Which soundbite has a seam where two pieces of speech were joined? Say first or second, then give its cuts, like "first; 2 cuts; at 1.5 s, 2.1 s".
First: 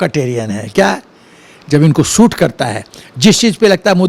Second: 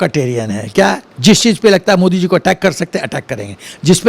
second; 1 cut; at 1.1 s